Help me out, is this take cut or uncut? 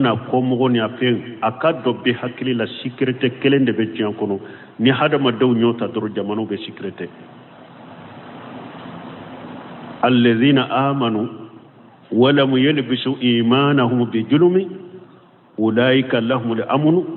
uncut